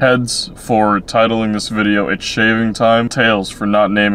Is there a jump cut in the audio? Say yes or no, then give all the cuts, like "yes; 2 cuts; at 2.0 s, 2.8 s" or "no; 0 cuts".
no; 0 cuts